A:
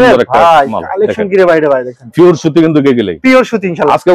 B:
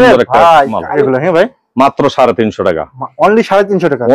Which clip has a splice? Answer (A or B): B